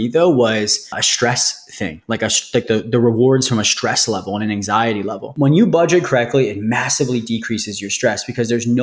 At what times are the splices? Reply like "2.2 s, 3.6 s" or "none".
1.1 s, 5.3 s